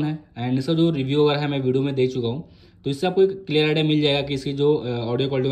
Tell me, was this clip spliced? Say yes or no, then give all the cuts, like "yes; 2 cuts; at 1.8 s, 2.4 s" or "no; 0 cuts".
no; 0 cuts